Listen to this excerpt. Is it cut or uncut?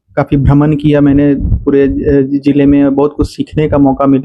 uncut